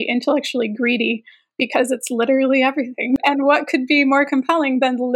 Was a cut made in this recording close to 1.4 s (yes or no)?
no